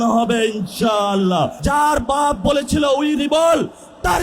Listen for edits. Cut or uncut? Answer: cut